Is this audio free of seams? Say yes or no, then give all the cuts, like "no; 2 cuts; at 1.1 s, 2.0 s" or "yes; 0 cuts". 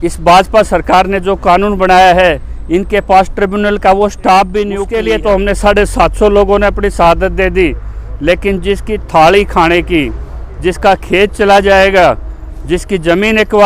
no; 1 cut; at 4.9 s